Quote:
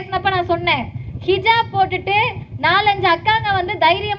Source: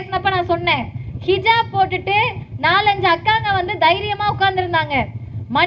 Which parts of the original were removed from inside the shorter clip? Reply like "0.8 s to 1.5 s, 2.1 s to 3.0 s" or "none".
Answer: none